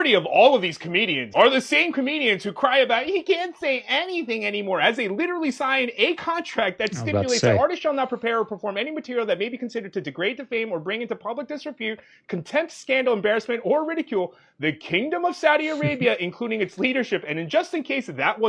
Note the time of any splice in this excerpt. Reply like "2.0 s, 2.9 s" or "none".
none